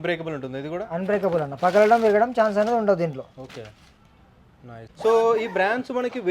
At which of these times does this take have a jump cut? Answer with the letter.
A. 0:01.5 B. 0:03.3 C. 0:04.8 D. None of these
C